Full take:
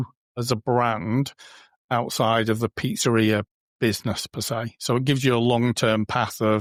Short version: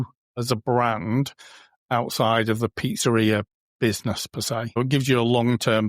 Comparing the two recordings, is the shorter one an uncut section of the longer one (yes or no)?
no